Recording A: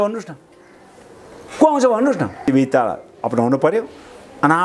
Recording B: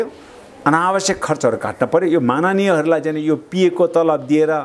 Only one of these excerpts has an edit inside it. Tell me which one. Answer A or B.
A